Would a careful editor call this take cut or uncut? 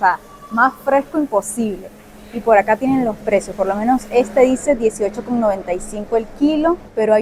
uncut